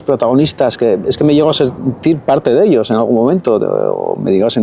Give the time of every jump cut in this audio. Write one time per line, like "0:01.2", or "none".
none